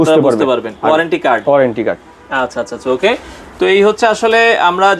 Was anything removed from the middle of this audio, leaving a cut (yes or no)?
no